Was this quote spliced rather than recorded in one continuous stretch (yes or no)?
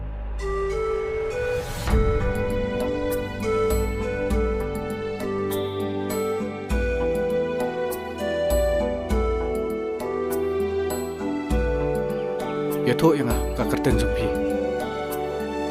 no